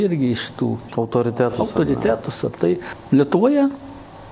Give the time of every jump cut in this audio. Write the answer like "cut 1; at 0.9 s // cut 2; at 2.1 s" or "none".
cut 1; at 0.9 s // cut 2; at 2.9 s